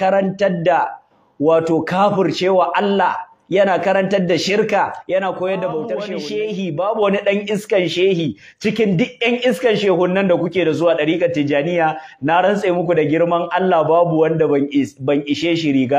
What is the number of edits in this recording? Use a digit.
1